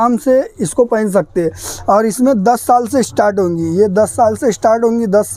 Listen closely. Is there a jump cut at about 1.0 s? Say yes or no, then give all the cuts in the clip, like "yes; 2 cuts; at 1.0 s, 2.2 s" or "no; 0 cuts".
no; 0 cuts